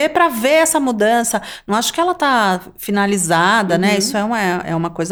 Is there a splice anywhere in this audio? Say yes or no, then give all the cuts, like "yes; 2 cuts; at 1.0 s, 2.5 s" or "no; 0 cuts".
no; 0 cuts